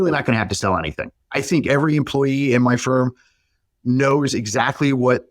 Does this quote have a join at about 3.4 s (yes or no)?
no